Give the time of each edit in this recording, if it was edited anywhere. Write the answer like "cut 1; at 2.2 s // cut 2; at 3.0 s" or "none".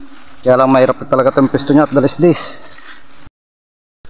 cut 1; at 2.5 s